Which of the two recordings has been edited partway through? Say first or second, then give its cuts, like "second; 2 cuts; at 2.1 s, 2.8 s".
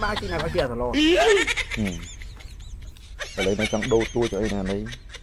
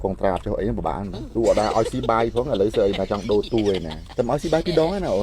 second; 2 cuts; at 1.2 s, 4.0 s